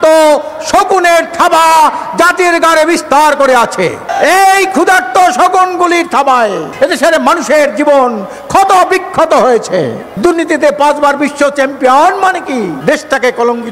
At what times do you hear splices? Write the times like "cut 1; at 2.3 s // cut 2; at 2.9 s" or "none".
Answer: cut 1; at 4.1 s // cut 2; at 6.6 s // cut 3; at 10.0 s // cut 4; at 12.8 s